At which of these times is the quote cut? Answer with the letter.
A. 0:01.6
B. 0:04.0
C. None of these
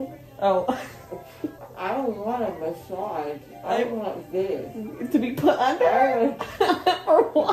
A